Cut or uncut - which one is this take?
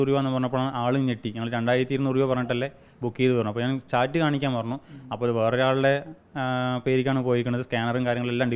uncut